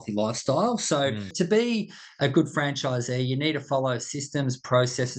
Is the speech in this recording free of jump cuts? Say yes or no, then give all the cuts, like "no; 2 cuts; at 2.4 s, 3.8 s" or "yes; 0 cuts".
no; 1 cut; at 1.3 s